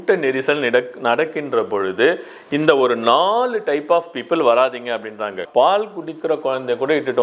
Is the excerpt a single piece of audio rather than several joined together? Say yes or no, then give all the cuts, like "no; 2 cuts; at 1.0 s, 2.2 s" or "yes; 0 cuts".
no; 1 cut; at 5.4 s